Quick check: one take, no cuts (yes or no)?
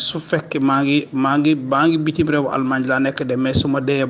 yes